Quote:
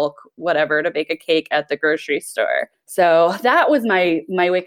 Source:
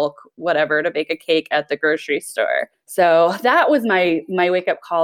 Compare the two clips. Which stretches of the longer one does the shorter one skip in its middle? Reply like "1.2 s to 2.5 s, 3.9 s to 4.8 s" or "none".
none